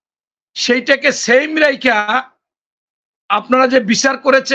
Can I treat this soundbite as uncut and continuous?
yes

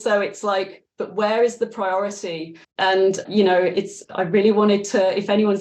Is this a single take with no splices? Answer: no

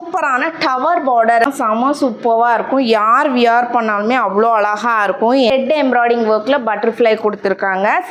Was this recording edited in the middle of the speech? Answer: yes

